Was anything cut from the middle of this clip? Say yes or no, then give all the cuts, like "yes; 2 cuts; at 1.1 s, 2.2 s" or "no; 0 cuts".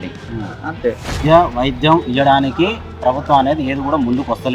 yes; 1 cut; at 1.1 s